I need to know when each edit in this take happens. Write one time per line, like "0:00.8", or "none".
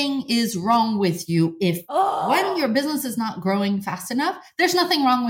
0:02.2